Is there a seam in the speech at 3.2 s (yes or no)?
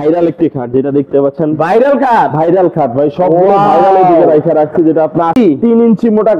no